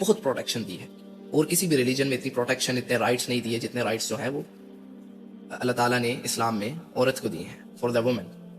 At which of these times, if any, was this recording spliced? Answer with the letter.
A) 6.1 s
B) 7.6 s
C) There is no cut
C